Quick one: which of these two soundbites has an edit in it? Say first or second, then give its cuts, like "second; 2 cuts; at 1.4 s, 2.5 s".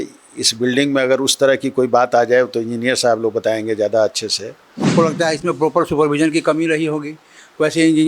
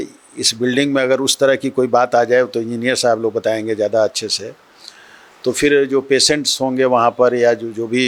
first; 1 cut; at 4.7 s